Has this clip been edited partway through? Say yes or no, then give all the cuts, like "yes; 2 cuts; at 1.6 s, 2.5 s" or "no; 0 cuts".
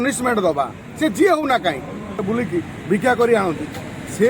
yes; 1 cut; at 2.2 s